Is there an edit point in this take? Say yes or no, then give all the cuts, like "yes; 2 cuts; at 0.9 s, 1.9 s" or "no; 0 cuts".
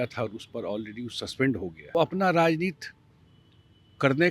yes; 1 cut; at 1.9 s